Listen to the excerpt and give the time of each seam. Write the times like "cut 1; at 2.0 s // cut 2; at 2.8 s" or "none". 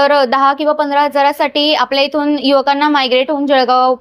none